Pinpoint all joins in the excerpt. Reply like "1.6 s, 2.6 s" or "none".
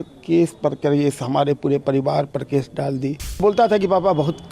3.4 s